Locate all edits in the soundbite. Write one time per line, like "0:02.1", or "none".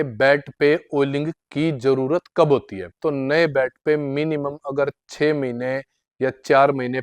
0:03.0